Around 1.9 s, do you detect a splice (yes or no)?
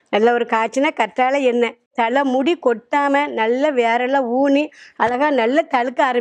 yes